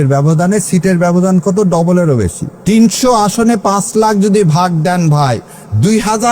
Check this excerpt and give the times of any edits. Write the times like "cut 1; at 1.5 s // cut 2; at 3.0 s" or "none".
cut 1; at 2.5 s